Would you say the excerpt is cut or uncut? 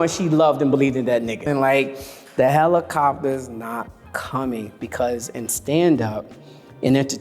cut